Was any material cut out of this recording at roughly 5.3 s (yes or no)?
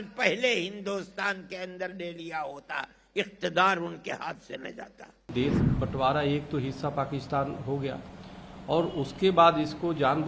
yes